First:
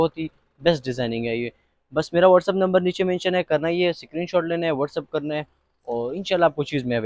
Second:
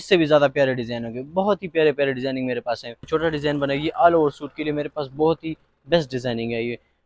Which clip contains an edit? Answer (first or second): second